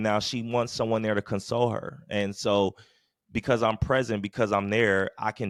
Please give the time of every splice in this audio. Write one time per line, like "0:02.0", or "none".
none